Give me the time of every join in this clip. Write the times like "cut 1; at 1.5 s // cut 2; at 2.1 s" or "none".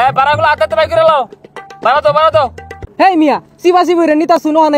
none